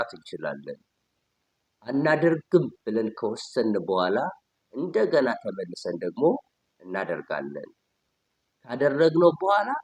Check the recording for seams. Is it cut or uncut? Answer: uncut